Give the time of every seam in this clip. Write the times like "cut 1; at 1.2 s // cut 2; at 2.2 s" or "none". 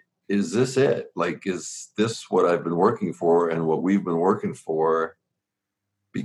none